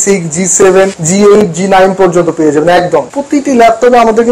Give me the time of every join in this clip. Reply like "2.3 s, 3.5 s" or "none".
1.0 s, 3.2 s